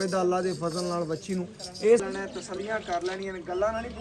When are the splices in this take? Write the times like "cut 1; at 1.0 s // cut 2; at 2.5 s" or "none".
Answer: cut 1; at 2.0 s